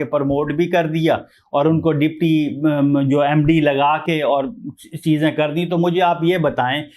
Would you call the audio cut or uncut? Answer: uncut